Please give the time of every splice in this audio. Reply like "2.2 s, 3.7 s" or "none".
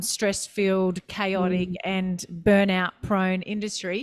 none